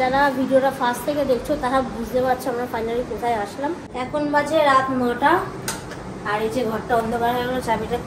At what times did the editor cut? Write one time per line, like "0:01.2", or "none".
0:03.9